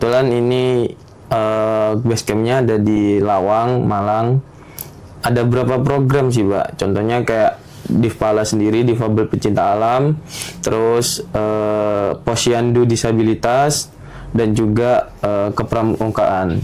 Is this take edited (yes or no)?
no